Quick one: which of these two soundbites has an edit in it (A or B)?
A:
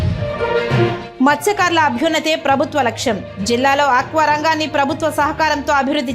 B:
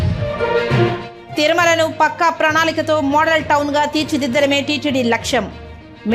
A